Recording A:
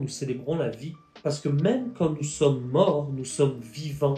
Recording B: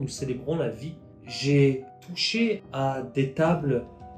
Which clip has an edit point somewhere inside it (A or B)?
B